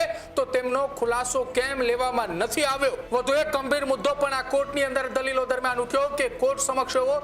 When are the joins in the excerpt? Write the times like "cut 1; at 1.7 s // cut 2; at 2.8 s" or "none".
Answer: cut 1; at 3.0 s